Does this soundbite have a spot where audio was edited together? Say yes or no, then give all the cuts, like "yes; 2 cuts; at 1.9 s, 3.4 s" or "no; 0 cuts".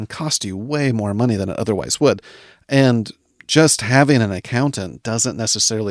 no; 0 cuts